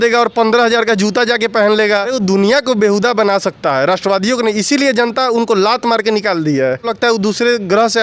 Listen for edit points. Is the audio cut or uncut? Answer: cut